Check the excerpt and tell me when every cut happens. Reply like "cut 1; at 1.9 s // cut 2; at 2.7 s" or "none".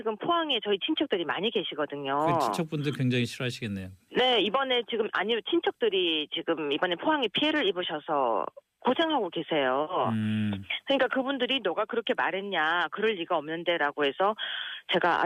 none